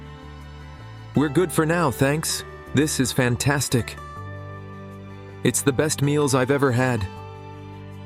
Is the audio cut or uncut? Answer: uncut